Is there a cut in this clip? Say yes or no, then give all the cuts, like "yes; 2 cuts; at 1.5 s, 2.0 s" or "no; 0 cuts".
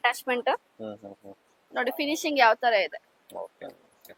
no; 0 cuts